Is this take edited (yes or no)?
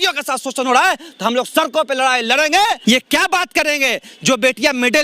yes